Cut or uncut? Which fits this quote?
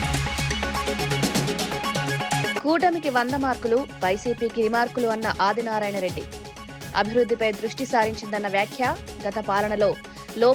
cut